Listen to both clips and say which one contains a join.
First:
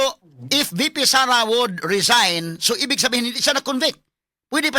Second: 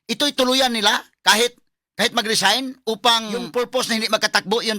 second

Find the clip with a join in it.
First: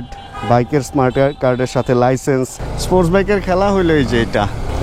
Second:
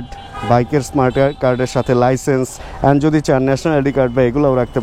first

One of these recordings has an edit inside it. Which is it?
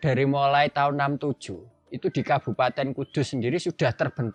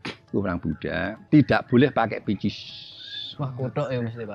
second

